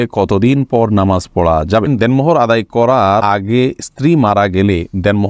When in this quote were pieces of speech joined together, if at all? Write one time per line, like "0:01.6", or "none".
0:01.9
0:03.2